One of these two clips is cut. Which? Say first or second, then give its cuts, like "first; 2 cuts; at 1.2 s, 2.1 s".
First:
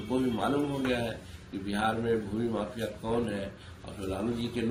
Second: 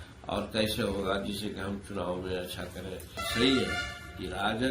second; 1 cut; at 3.2 s